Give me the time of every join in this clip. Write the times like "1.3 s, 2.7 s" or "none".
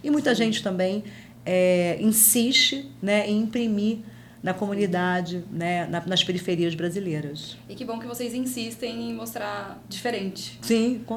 none